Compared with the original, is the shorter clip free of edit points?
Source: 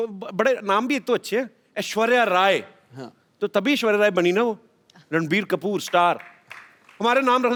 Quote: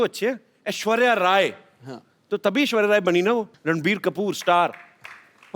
no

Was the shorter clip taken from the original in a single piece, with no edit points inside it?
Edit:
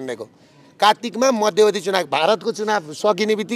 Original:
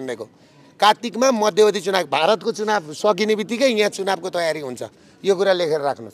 yes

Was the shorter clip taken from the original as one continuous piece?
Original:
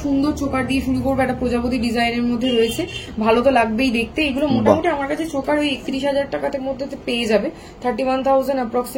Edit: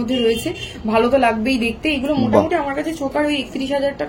yes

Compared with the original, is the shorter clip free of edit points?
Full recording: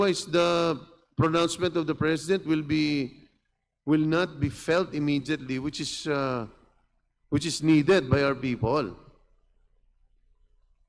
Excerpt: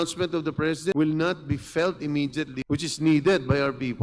no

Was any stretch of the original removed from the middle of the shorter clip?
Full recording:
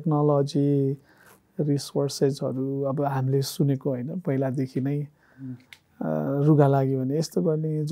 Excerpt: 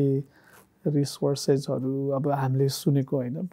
no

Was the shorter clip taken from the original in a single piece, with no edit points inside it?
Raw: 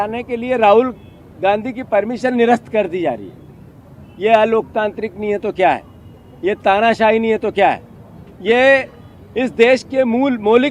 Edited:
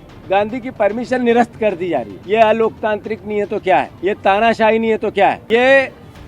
no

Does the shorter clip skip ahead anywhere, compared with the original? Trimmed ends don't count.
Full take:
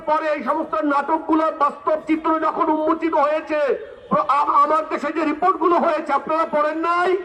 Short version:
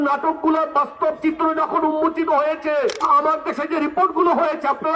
yes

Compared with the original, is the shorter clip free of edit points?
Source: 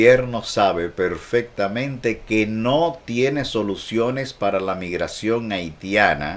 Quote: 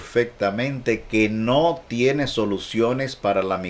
yes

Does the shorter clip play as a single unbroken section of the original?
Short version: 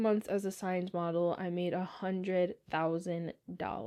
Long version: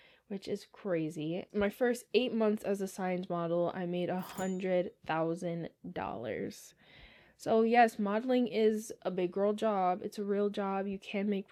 yes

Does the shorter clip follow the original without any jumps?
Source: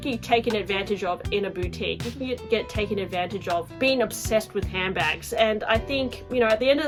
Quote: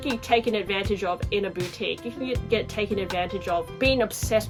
yes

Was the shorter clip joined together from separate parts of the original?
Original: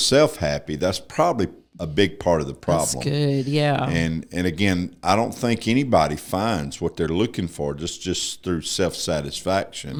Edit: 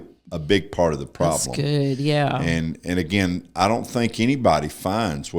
no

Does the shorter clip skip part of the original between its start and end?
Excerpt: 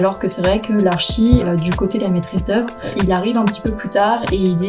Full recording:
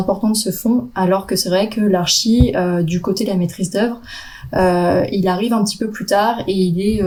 yes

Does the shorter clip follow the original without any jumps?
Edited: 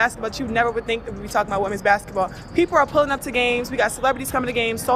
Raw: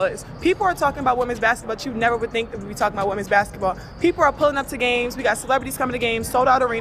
yes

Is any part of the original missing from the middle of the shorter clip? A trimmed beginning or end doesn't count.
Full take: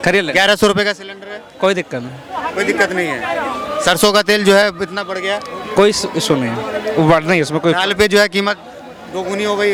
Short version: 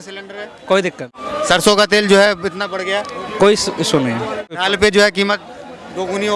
yes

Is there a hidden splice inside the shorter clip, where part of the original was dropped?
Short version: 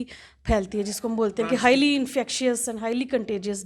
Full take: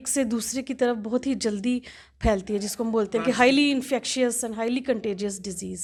no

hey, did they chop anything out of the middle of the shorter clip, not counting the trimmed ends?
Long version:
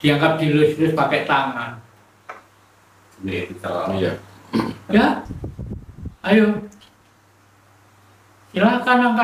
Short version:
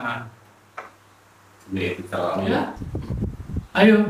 yes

